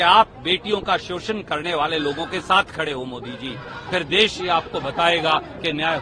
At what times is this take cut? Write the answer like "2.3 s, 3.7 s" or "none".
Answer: none